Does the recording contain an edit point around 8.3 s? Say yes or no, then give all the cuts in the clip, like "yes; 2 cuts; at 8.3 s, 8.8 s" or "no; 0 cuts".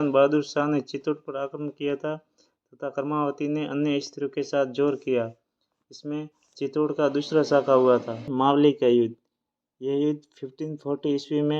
yes; 1 cut; at 8.3 s